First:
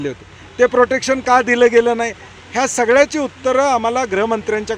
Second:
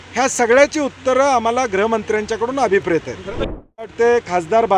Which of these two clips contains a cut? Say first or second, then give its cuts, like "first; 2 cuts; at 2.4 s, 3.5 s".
second; 1 cut; at 3.5 s